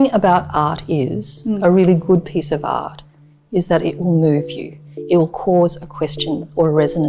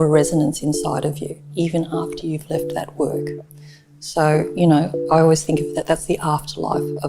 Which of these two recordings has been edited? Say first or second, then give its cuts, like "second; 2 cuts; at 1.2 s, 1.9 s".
second; 1 cut; at 1.5 s